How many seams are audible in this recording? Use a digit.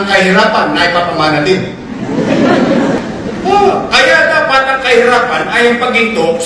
1